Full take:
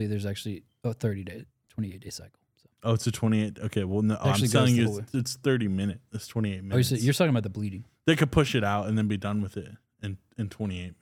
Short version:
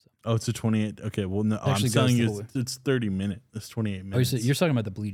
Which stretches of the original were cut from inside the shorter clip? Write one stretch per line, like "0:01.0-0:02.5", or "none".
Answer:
none